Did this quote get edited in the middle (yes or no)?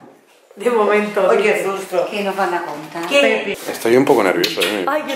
yes